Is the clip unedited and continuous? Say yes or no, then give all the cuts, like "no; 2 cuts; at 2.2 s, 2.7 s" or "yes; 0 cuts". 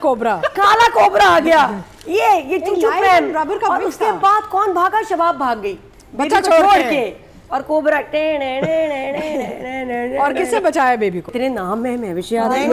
no; 1 cut; at 11.3 s